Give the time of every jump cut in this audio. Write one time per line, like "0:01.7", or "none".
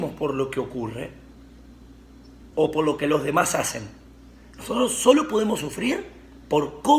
none